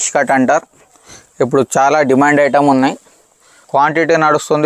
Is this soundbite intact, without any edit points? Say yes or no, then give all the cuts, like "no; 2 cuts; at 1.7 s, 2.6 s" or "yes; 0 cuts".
no; 1 cut; at 3.6 s